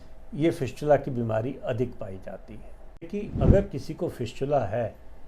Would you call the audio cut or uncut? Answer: cut